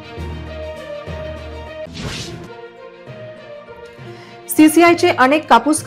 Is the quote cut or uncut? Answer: cut